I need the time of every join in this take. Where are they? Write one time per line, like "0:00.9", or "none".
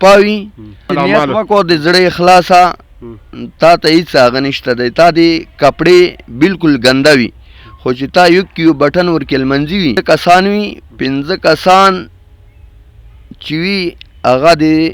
0:00.9
0:10.0